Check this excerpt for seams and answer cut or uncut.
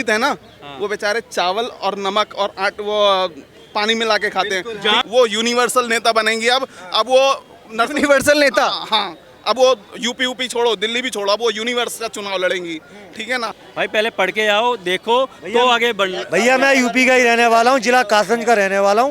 cut